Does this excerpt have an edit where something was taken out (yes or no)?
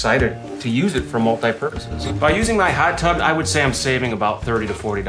yes